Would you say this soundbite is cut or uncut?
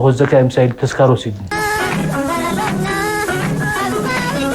cut